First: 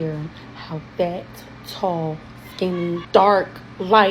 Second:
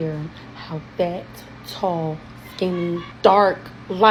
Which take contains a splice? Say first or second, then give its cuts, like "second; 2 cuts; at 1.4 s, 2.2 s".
first; 1 cut; at 3.0 s